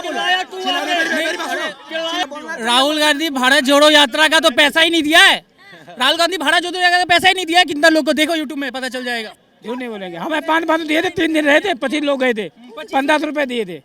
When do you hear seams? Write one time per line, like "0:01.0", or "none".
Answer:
0:02.2

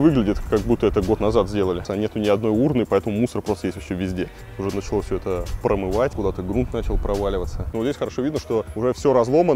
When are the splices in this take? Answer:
0:01.9
0:04.4
0:06.1
0:07.7
0:08.7

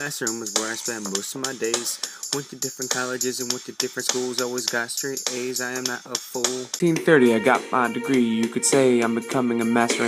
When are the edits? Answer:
0:06.7

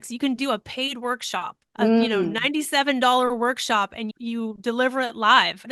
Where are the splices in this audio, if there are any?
none

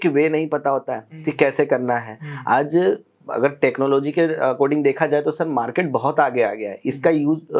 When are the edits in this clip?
none

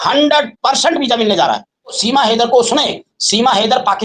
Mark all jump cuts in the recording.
0:02.0

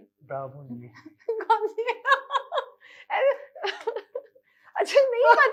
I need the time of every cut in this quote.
none

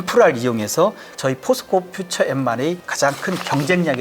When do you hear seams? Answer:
0:01.1
0:02.9

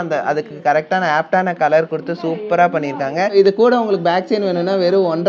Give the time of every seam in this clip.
0:03.3

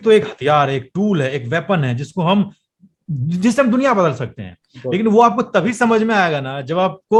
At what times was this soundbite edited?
none

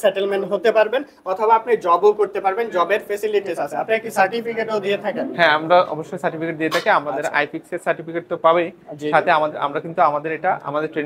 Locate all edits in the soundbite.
none

